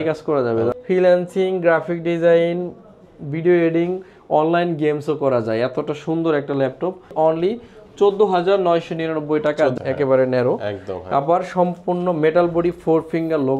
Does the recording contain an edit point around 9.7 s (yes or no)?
yes